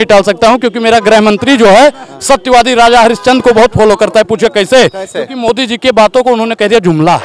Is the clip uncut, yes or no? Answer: yes